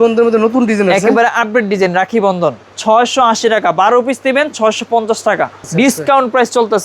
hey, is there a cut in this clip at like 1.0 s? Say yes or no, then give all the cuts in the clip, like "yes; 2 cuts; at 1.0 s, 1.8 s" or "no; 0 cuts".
no; 2 cuts; at 2.7 s, 5.6 s